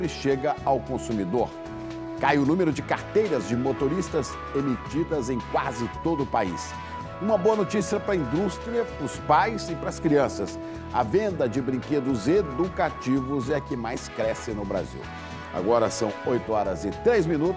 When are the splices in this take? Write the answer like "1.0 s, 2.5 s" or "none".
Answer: 11.8 s